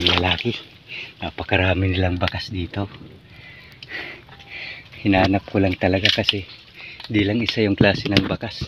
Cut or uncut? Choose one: uncut